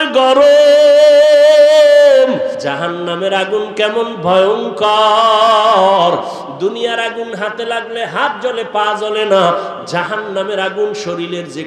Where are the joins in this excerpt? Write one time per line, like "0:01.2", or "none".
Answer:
0:02.6